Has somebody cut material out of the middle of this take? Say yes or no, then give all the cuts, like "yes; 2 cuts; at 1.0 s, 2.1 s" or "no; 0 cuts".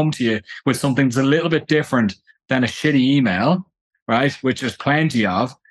no; 0 cuts